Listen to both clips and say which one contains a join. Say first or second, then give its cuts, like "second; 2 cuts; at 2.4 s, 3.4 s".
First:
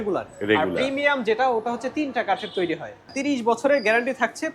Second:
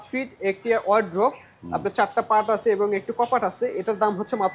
first; 1 cut; at 3.1 s